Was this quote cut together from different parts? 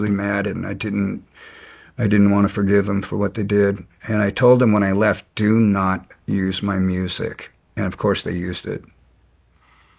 no; 0 cuts

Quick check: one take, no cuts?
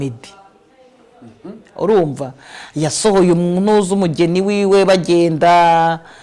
yes; 0 cuts

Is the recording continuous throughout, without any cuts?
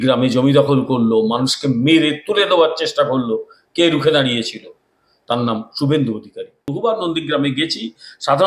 no; 1 cut; at 6.6 s

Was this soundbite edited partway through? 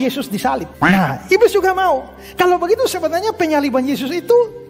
no; 0 cuts

